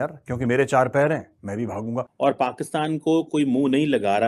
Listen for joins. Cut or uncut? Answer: cut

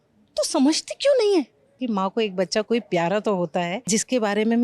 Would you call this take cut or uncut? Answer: cut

